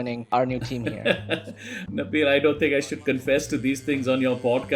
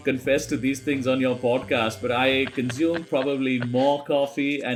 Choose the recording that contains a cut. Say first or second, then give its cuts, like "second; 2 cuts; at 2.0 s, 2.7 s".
first; 1 cut; at 1.8 s